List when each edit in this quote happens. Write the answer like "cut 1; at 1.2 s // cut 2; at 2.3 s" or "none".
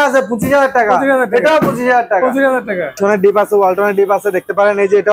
cut 1; at 3.0 s